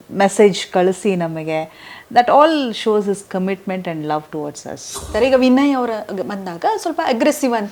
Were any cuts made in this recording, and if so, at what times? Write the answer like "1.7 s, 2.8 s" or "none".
5.1 s